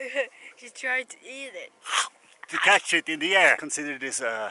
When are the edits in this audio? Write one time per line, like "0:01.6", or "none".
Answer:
0:03.6